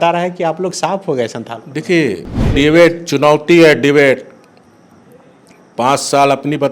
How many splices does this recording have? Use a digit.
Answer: 1